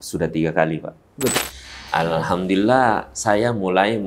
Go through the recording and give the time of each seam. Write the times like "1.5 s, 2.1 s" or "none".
1.3 s